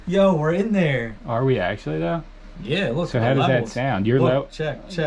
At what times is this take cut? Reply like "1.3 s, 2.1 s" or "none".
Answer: none